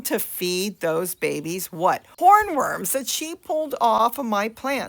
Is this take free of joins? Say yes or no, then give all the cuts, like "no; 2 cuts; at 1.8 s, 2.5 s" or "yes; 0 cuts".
no; 1 cut; at 4.0 s